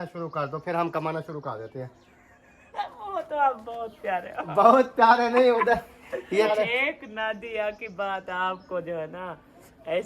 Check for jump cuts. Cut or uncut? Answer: cut